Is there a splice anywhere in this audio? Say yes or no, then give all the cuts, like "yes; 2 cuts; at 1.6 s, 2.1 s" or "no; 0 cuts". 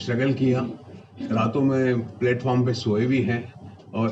no; 0 cuts